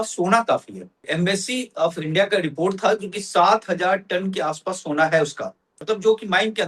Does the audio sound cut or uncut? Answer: cut